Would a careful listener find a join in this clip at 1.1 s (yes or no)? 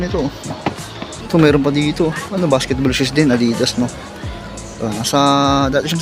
yes